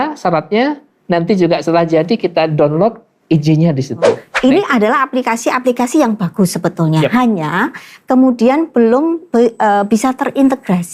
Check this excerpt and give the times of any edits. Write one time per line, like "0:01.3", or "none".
0:04.3